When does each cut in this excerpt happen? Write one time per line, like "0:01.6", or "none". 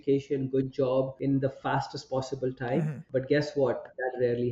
0:01.1
0:03.0